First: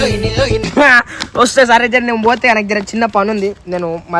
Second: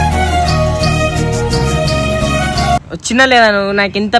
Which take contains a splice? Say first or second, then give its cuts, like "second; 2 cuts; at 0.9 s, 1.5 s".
second; 1 cut; at 2.8 s